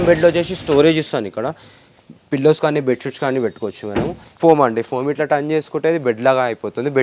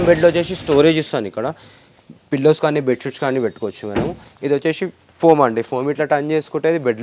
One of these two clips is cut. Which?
first; 1 cut; at 4.2 s

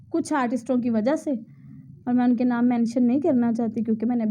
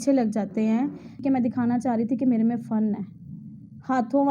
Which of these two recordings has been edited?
second; 1 cut; at 1.2 s

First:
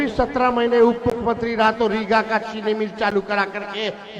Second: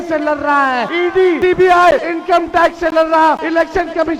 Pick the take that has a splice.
second; 3 cuts; at 1.2 s, 2.1 s, 3.4 s

